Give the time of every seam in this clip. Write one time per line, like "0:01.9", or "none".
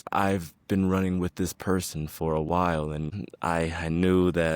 0:03.2

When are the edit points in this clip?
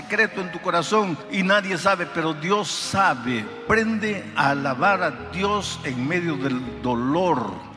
0:01.2
0:03.6

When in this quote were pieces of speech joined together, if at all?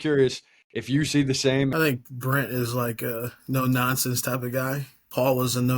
0:01.7

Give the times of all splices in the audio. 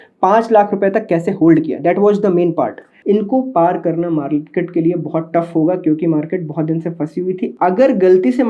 0:02.9
0:07.5

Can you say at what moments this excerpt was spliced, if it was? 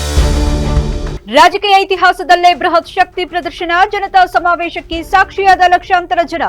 0:01.2

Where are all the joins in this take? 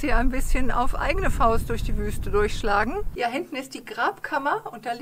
0:03.1

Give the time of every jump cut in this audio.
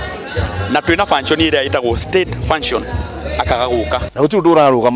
0:04.0

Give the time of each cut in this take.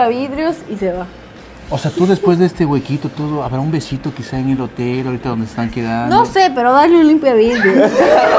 none

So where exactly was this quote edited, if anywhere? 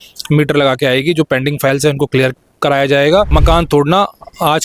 0:03.3

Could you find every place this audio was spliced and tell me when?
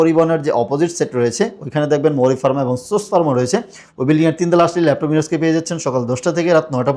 none

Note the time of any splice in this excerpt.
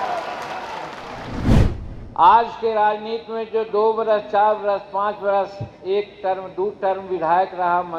0:01.5

